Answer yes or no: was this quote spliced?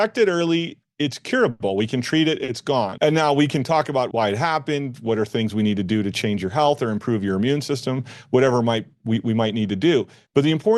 yes